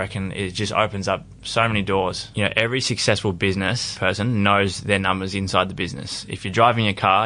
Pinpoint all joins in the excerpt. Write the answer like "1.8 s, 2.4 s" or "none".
2.2 s, 3.9 s